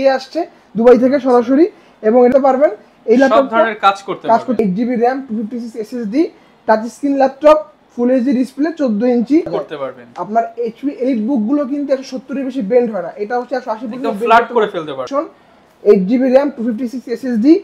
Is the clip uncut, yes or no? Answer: no